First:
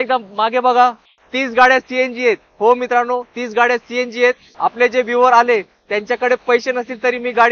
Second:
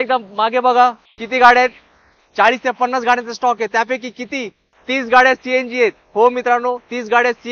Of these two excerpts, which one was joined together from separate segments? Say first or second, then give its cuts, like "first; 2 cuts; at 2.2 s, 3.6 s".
first; 2 cuts; at 1.1 s, 4.5 s